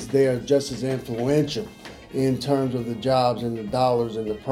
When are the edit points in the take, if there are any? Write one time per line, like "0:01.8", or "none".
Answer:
none